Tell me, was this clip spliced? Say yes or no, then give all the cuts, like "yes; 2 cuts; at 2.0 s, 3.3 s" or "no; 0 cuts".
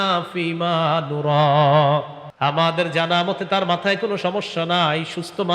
yes; 1 cut; at 2.2 s